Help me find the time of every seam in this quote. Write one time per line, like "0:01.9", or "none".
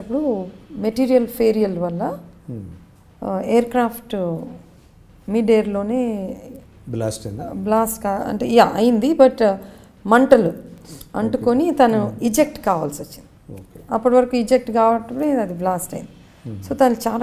none

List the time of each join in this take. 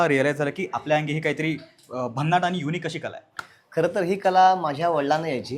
none

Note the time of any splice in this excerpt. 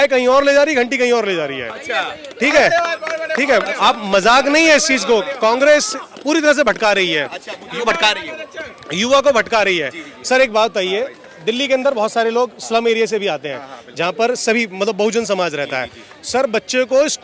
none

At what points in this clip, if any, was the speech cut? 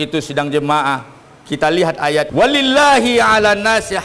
0:02.3

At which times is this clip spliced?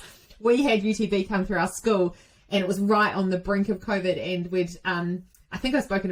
none

